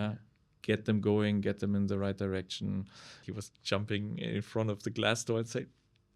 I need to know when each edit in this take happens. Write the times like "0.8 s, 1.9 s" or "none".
3.2 s